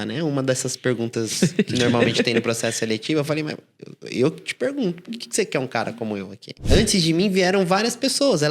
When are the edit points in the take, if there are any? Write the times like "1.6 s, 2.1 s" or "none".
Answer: 6.5 s